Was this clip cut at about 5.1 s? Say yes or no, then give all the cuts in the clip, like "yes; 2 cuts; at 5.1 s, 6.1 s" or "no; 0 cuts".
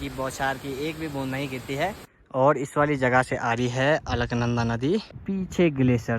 yes; 2 cuts; at 2.1 s, 5.1 s